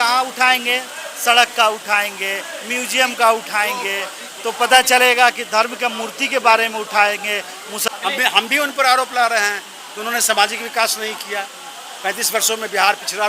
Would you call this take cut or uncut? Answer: cut